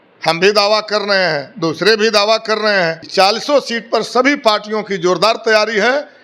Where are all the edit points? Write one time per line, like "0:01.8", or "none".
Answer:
0:03.0